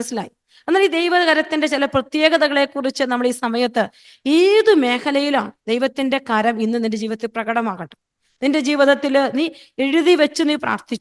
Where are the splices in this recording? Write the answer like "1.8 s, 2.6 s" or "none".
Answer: 4.0 s